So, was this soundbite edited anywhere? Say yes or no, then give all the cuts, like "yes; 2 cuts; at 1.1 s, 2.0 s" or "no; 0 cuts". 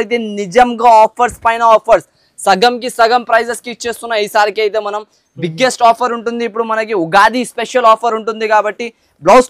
no; 0 cuts